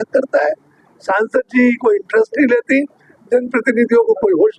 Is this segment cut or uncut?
uncut